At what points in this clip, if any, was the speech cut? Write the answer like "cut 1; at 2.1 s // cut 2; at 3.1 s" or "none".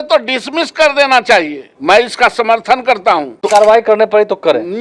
cut 1; at 1.6 s // cut 2; at 3.3 s